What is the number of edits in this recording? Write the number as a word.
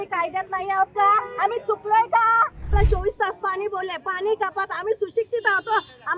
one